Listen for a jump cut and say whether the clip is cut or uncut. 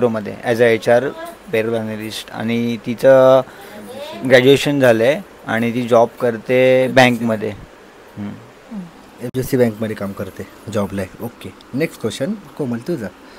uncut